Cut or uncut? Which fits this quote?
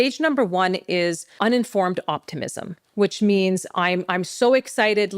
cut